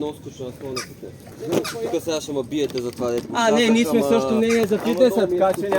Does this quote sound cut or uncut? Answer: cut